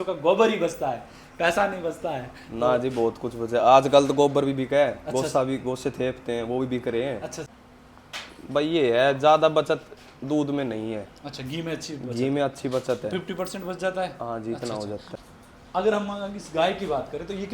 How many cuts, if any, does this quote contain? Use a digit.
2